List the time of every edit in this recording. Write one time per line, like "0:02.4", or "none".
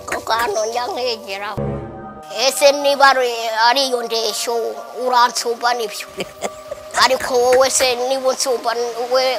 0:01.6